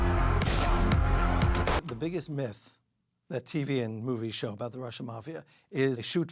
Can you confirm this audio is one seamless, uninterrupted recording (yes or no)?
yes